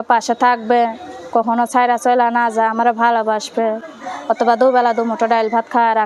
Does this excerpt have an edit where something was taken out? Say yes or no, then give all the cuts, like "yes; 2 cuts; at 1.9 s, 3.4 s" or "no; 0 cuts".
no; 0 cuts